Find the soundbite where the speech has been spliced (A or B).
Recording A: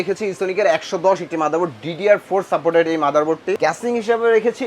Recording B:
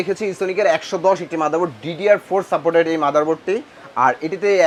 A